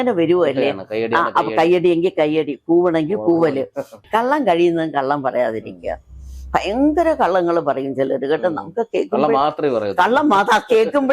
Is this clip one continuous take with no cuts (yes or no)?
no